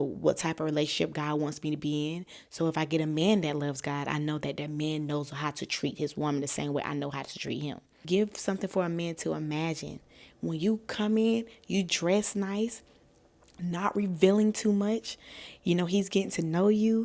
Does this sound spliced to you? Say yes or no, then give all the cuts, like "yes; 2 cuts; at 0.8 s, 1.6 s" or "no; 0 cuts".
yes; 1 cut; at 8.0 s